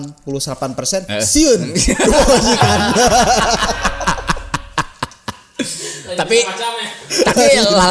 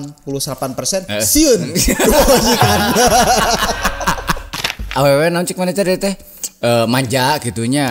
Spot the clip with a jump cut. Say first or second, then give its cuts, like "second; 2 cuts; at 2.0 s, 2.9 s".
second; 1 cut; at 4.9 s